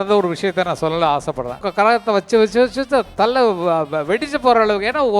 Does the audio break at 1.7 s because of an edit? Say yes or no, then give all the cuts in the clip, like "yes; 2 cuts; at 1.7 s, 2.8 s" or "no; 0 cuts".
yes; 1 cut; at 1.7 s